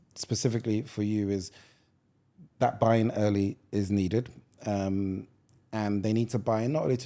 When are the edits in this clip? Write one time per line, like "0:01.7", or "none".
none